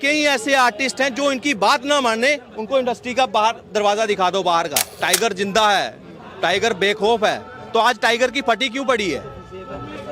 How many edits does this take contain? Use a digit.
1